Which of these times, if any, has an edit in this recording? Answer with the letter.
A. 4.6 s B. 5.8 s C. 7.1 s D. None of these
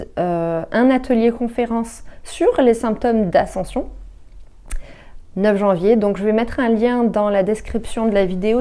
D